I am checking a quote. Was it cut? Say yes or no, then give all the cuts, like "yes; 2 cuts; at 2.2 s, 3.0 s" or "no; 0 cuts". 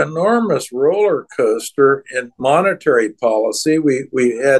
no; 0 cuts